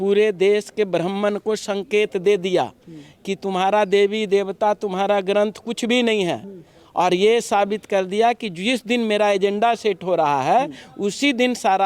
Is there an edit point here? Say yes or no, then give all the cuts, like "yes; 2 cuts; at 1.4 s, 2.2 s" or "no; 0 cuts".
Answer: no; 0 cuts